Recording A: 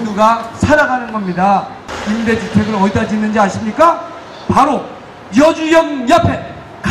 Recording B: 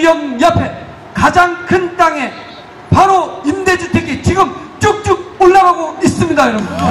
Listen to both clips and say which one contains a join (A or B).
A